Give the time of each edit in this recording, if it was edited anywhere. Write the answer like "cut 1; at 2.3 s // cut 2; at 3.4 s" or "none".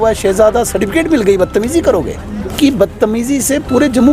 cut 1; at 2.5 s